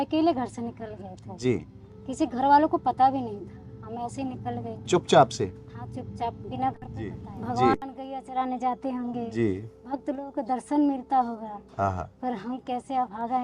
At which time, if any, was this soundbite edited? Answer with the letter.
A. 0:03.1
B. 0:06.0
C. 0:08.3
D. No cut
C